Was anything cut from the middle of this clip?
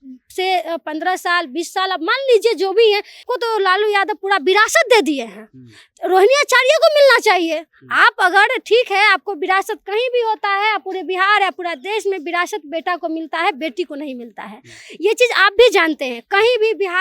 yes; 1 cut; at 3.2 s

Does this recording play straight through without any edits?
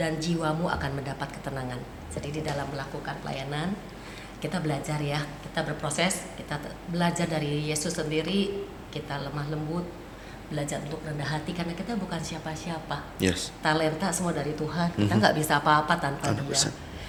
yes; 0 cuts

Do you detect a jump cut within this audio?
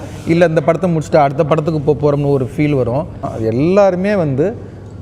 yes; 1 cut; at 3.3 s

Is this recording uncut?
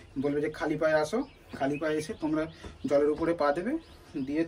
yes; 0 cuts

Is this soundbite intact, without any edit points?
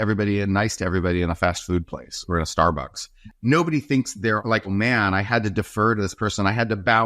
no; 1 cut; at 3.2 s

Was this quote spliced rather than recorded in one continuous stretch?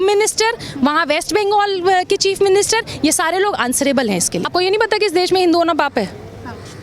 no; 0 cuts

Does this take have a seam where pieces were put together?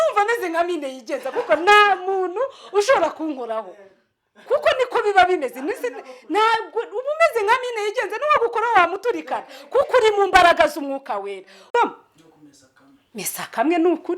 yes; 1 cut; at 11.7 s

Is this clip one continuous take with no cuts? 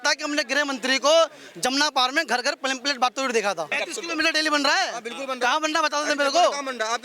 no; 1 cut; at 3.8 s

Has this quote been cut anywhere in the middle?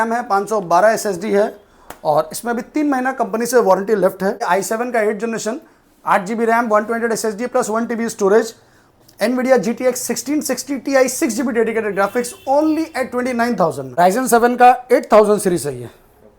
yes; 2 cuts; at 4.4 s, 13.8 s

